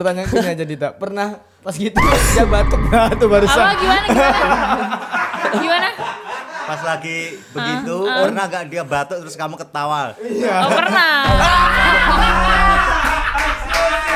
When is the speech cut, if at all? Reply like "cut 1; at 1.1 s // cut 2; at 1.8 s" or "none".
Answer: none